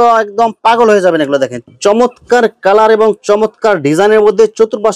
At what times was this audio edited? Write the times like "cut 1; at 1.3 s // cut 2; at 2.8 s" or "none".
cut 1; at 1.6 s